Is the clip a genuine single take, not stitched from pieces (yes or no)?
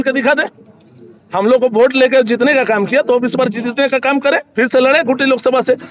yes